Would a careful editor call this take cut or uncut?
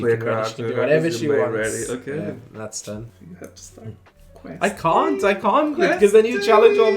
cut